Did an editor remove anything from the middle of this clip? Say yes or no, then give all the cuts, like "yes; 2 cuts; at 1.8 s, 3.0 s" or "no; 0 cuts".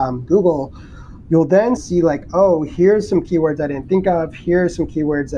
yes; 1 cut; at 1.8 s